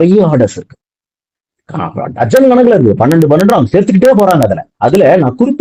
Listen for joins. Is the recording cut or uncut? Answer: uncut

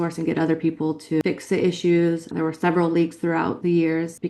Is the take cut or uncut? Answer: cut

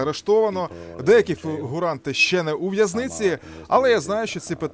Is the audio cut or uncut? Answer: uncut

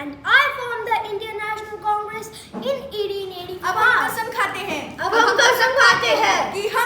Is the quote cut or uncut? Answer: cut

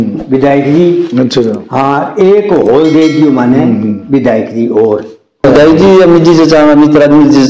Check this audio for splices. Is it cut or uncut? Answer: cut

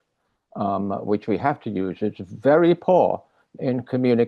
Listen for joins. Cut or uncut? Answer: uncut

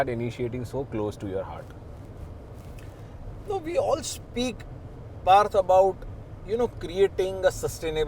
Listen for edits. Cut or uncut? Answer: uncut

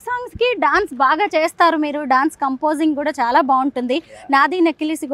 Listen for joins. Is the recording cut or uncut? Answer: uncut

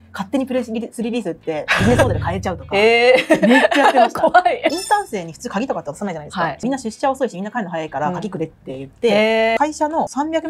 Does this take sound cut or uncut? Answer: cut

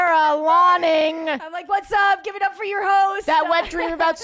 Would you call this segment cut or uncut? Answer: cut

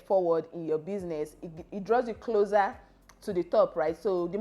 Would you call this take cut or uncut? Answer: uncut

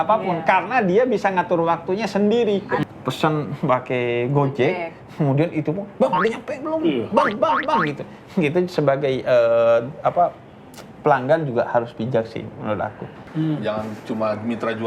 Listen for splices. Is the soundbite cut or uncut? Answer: cut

